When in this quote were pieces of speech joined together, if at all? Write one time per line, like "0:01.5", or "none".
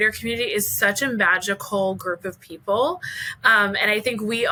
none